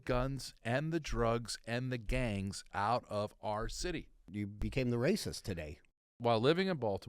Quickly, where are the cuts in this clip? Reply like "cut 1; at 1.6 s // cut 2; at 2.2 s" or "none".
cut 1; at 4.3 s // cut 2; at 6.0 s